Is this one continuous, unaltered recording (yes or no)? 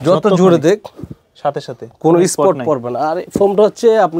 yes